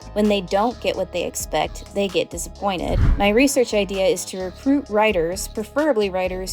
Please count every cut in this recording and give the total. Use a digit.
1